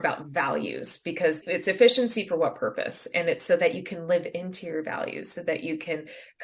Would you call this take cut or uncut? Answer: cut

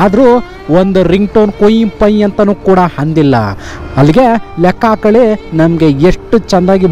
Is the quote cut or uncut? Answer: uncut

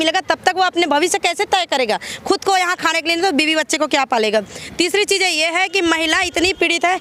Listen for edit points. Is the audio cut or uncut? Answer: uncut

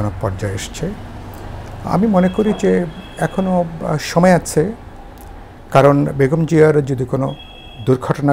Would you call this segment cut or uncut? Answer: uncut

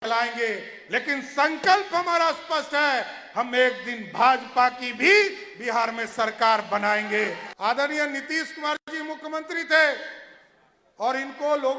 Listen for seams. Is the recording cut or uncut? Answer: cut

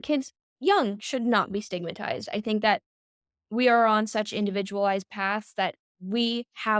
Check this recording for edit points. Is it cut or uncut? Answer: uncut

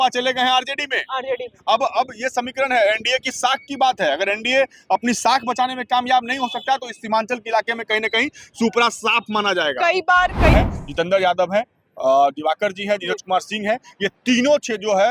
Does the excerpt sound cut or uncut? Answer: cut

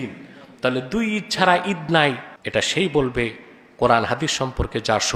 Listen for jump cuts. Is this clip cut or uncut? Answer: cut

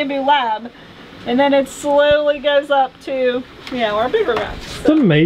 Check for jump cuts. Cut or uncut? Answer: uncut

